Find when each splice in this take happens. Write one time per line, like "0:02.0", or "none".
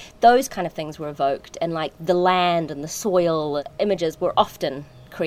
0:03.7